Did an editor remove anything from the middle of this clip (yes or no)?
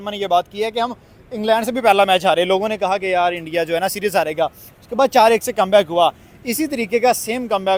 no